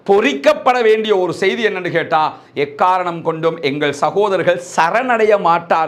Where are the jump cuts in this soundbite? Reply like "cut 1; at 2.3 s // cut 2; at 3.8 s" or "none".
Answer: none